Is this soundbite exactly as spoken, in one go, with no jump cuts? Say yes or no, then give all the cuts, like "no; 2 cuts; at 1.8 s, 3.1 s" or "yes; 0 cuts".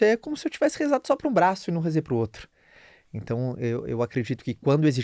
yes; 0 cuts